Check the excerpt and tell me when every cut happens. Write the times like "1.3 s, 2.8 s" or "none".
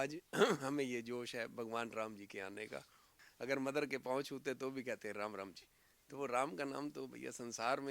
3.1 s